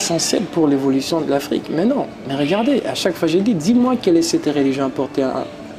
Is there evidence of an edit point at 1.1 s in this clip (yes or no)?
no